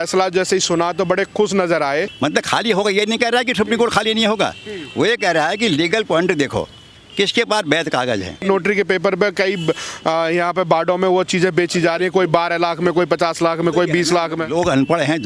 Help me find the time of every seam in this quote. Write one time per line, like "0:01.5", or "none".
0:02.1
0:08.4